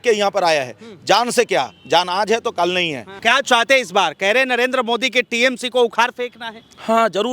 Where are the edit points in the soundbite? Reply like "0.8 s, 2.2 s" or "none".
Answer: 3.0 s